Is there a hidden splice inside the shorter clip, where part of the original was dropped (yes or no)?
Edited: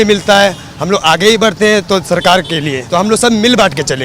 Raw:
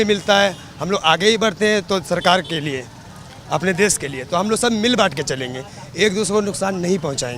yes